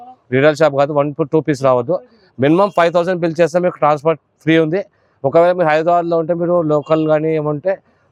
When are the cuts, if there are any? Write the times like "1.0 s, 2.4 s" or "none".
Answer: none